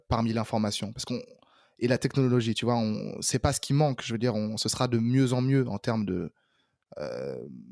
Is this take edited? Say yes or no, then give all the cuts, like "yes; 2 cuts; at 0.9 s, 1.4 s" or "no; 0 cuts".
no; 0 cuts